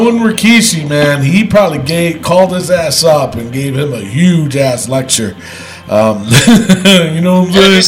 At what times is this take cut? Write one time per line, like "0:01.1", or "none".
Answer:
none